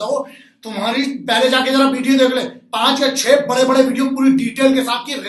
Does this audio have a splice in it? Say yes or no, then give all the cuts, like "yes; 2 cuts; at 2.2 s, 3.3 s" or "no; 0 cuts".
no; 0 cuts